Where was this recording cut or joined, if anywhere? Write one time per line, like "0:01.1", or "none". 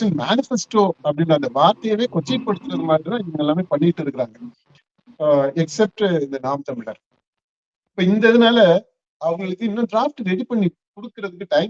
none